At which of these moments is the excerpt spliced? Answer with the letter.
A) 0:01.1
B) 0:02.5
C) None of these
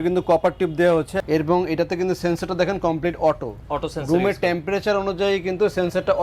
A